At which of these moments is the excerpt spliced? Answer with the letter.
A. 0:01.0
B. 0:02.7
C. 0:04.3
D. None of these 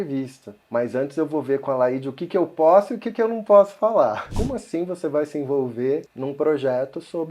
C